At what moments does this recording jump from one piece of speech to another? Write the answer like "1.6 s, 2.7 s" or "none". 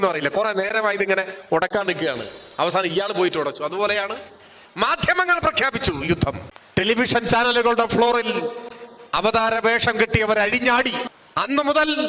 6.5 s, 11.1 s